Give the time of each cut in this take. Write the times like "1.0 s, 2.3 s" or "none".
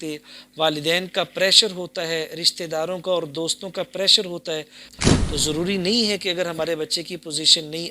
4.8 s